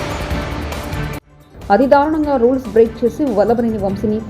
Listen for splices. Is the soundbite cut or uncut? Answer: cut